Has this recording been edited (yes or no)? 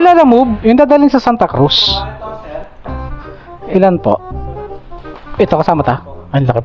no